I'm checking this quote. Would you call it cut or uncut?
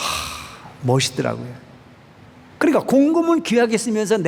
uncut